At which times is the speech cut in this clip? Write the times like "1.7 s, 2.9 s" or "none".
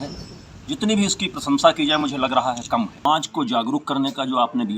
2.0 s, 3.1 s